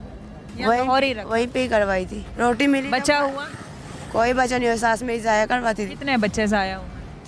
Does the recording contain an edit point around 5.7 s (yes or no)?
no